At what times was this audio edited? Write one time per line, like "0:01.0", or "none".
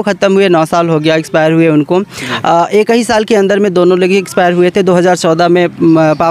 none